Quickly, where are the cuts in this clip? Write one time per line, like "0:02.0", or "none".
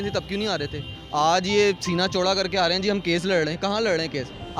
none